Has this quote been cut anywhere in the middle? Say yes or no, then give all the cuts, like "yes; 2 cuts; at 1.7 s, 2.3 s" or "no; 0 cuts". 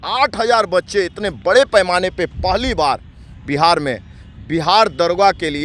no; 0 cuts